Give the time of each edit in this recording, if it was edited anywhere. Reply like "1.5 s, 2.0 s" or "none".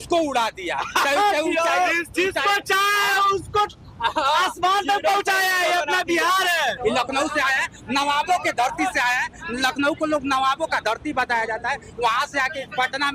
6.8 s